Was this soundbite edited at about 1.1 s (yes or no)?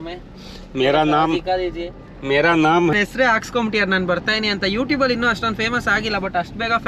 no